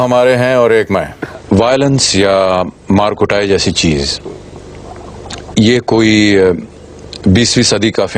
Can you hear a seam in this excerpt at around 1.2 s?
yes; 1 cut; at 1.2 s

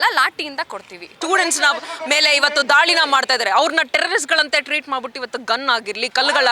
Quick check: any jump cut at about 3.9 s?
no; 1 cut; at 1.0 s

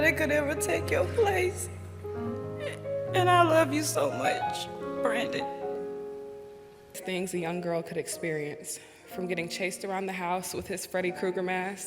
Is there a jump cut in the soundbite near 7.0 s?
yes; 1 cut; at 7.0 s

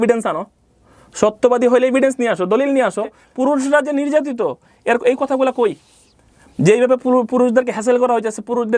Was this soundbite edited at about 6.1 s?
no; 1 cut; at 3.2 s

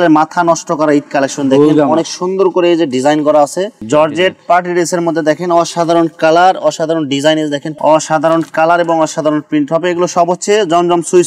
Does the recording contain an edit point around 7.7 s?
yes; 2 cuts; at 3.8 s, 7.7 s

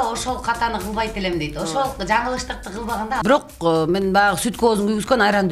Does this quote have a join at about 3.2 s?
yes; 1 cut; at 3.2 s

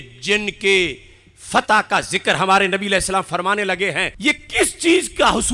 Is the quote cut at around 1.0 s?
no; 1 cut; at 4.1 s

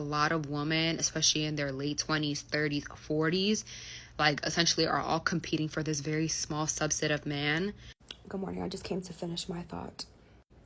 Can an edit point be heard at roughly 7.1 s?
no; 1 cut; at 2.4 s

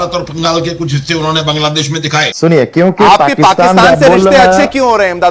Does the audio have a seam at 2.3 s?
yes; 1 cut; at 2.3 s

